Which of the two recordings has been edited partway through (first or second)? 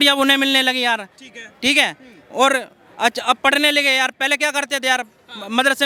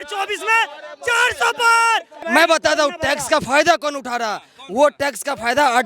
second